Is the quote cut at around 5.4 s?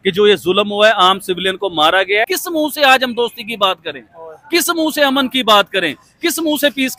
no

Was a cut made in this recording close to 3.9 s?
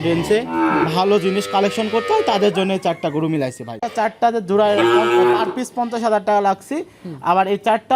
yes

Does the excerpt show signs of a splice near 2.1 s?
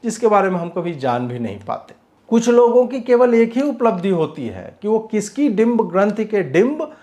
yes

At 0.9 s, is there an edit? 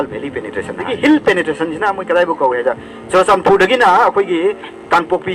yes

